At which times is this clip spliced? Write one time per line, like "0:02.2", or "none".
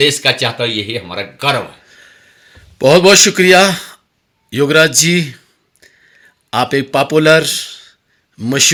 none